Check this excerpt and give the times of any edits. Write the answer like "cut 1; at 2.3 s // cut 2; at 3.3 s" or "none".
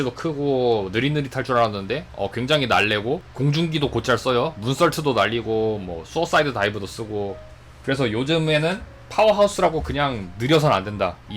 cut 1; at 3.3 s

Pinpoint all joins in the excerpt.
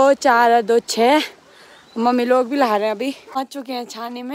cut 1; at 3.2 s

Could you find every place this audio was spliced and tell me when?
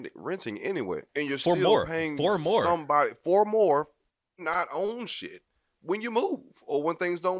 cut 1; at 1.1 s

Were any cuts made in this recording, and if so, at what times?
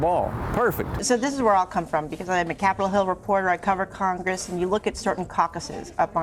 cut 1; at 1.0 s

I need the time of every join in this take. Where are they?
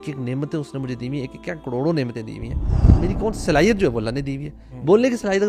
cut 1; at 2.8 s

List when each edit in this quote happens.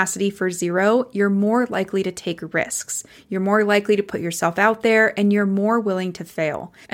none

